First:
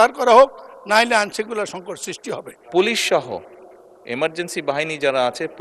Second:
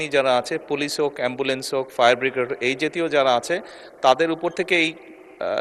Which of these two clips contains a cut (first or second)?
first